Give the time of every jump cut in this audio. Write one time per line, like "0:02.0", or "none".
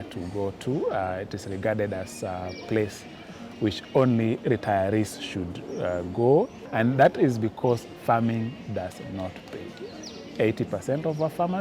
0:06.6